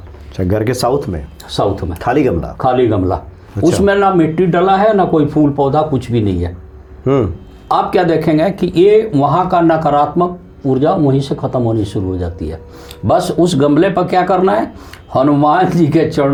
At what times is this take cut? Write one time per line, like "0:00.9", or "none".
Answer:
none